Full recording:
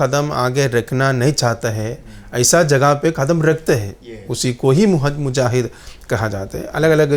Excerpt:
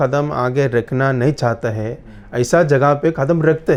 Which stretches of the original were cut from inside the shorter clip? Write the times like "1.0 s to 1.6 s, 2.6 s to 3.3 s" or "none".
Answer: none